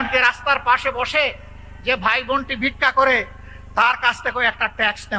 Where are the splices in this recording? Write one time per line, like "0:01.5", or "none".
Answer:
none